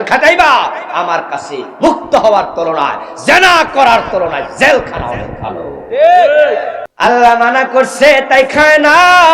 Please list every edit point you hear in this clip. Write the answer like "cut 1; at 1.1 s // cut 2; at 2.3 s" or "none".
cut 1; at 6.8 s